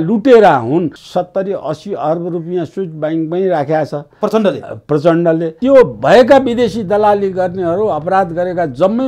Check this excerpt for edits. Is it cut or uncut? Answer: cut